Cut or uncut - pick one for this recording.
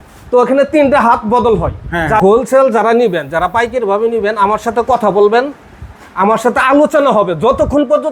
cut